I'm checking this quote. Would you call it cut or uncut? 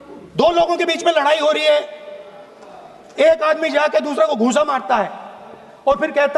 uncut